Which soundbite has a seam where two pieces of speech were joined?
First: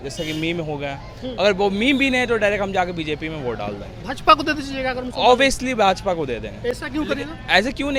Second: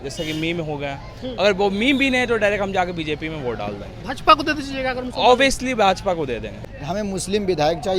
second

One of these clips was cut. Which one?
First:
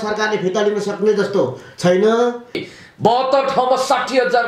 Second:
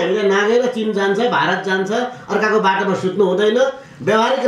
first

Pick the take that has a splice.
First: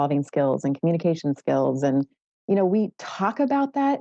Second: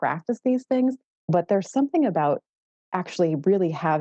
second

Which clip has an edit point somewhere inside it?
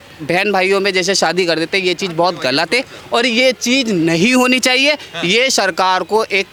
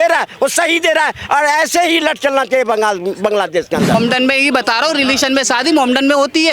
second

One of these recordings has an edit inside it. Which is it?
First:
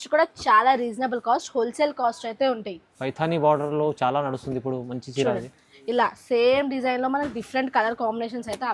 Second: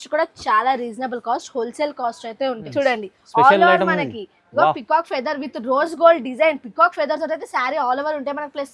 second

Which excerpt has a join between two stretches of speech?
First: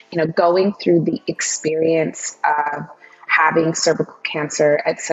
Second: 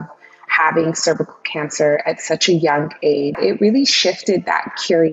second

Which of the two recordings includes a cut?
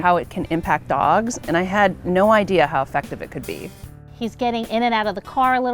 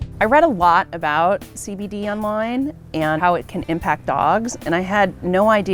first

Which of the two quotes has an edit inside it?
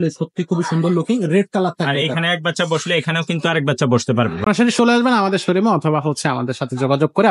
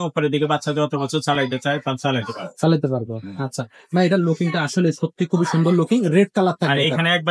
first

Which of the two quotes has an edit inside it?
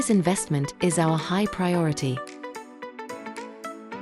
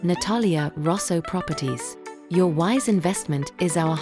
first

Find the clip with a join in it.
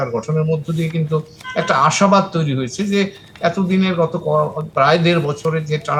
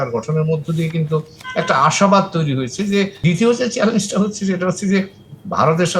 second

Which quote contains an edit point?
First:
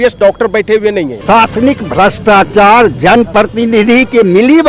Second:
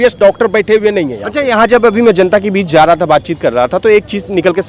first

